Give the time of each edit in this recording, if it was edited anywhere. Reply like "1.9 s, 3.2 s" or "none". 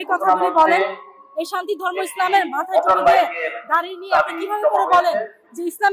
none